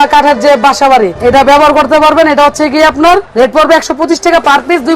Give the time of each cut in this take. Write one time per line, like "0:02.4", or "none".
0:01.1
0:03.3